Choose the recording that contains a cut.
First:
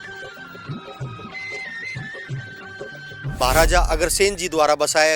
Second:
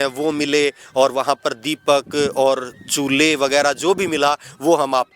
first; 1 cut; at 3.4 s

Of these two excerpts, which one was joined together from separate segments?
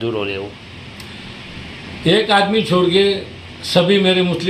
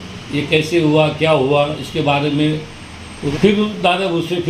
second; 1 cut; at 3.3 s

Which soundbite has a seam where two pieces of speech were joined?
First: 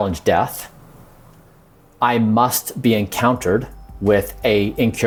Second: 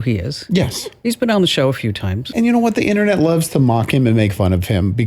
second; 2 cuts; at 1.0 s, 2.1 s

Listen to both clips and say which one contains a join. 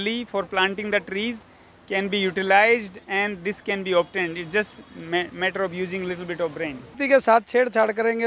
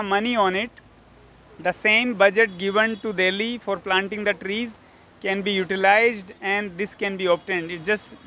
first; 1 cut; at 6.9 s

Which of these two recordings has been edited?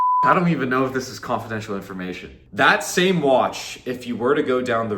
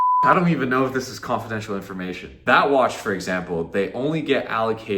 first; 1 cut; at 2.3 s

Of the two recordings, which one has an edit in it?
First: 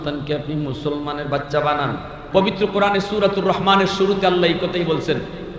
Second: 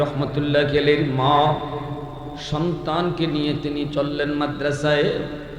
first; 1 cut; at 2.2 s

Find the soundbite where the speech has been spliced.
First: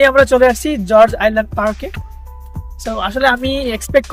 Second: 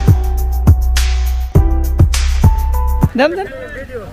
second; 3 cuts; at 0.9 s, 2.1 s, 3.1 s

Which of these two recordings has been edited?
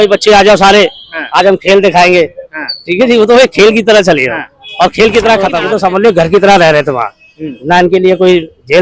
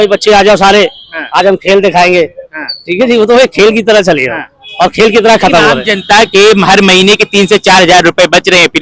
first; 1 cut; at 5.6 s

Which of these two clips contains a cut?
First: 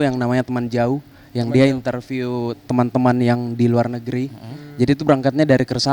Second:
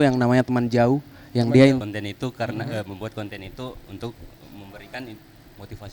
second; 1 cut; at 1.8 s

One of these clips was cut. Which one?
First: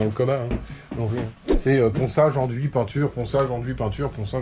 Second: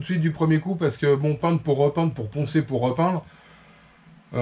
first; 1 cut; at 1.4 s

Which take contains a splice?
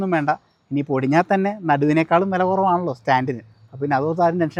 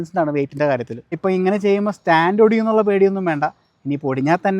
second; 1 cut; at 1.2 s

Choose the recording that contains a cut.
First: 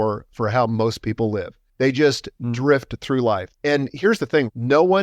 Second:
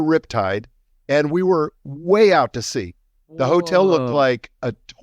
first; 2 cuts; at 1.6 s, 3.5 s

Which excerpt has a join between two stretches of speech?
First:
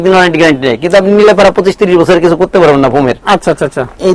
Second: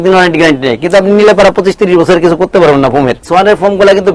second; 1 cut; at 3.2 s

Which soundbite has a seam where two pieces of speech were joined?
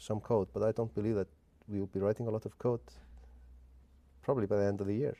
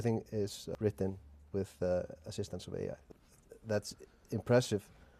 second; 2 cuts; at 0.7 s, 3.0 s

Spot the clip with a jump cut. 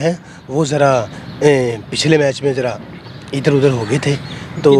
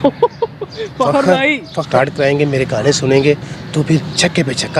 second; 1 cut; at 1.9 s

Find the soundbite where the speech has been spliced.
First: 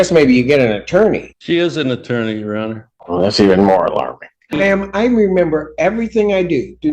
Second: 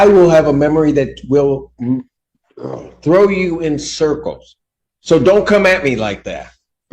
first; 3 cuts; at 1.3 s, 2.9 s, 4.6 s

